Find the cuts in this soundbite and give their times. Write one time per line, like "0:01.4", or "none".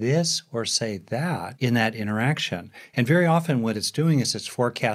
0:01.5